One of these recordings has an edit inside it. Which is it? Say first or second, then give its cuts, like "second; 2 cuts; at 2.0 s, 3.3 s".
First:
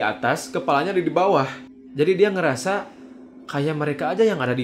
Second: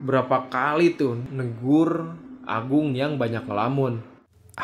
first; 1 cut; at 1.6 s